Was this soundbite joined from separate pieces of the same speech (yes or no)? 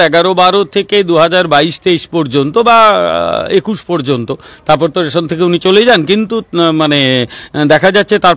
no